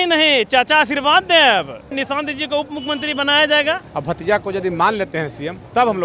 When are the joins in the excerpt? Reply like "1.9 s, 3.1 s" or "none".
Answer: 1.9 s, 3.9 s